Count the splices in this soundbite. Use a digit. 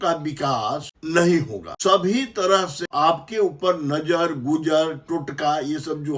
3